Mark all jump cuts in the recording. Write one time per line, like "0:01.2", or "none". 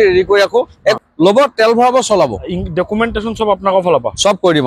0:01.0

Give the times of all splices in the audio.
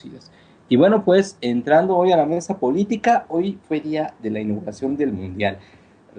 0:04.8

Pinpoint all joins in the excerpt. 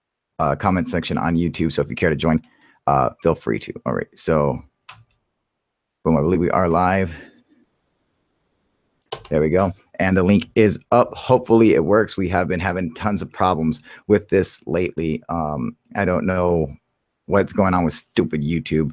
none

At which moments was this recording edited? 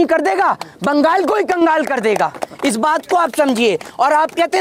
none

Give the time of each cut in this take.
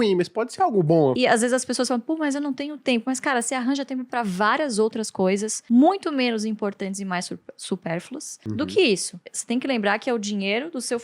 0:01.2

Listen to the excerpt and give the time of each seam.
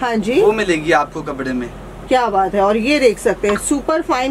none

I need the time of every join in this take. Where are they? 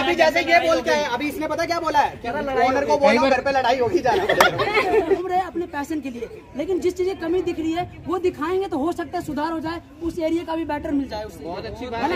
0:05.2

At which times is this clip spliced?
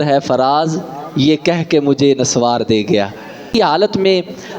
0:03.5

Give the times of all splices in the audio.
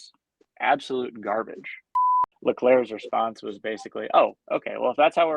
0:02.2

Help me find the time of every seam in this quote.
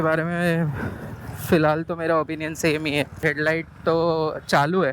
0:03.2

